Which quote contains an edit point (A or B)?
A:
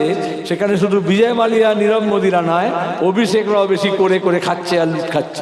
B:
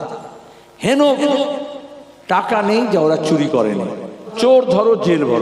B